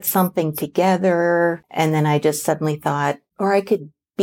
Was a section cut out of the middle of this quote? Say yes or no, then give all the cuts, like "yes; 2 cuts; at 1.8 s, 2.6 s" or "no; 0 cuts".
yes; 2 cuts; at 1.6 s, 3.3 s